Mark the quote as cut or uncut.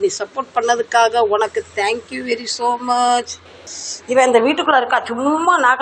uncut